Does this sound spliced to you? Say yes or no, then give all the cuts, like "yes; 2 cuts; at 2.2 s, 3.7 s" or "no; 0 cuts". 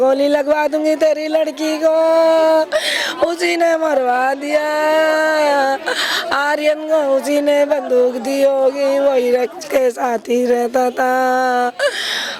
no; 0 cuts